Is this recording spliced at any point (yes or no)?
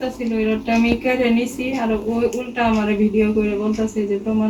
no